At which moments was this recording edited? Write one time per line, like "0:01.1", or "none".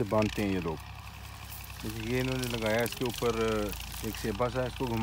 none

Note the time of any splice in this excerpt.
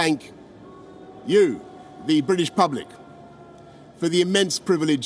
none

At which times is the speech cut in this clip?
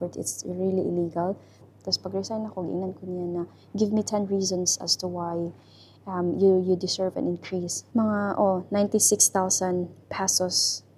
0:01.6
0:07.8

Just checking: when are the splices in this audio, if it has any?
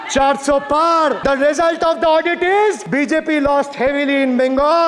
0:01.2
0:02.8

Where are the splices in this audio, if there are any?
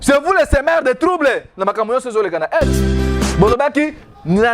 0:03.2

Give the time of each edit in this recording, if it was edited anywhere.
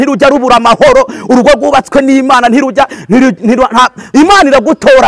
0:04.0

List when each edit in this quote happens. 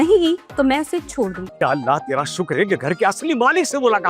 0:01.5

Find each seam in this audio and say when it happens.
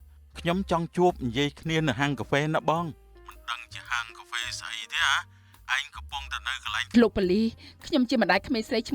0:06.9

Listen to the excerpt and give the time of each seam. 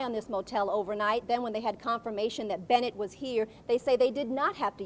none

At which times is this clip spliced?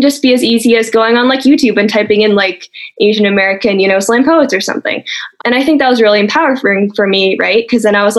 0:05.3

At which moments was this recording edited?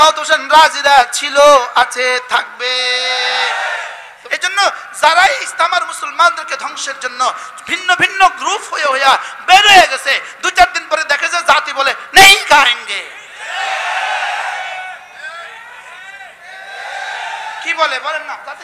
0:04.1

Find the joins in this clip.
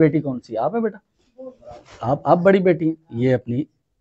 none

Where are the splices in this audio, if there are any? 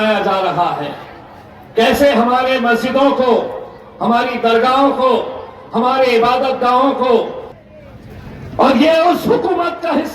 0:07.4

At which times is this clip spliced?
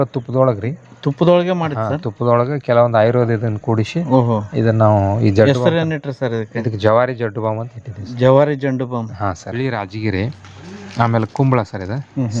0:09.6

